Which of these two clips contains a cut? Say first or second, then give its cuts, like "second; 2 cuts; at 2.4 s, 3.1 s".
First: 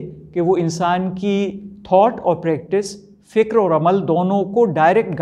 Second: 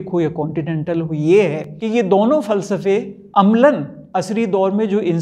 second; 3 cuts; at 1.7 s, 3.2 s, 4.0 s